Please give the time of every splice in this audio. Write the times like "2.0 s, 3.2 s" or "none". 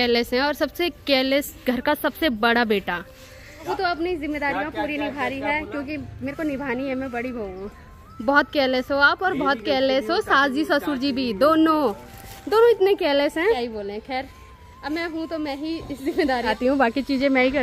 none